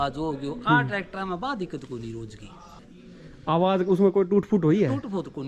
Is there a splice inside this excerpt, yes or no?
yes